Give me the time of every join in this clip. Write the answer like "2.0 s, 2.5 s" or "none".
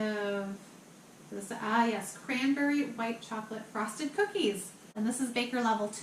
4.9 s